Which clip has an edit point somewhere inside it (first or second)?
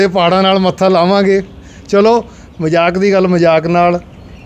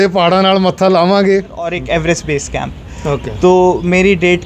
second